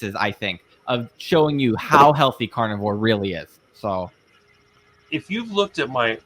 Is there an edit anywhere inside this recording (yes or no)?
no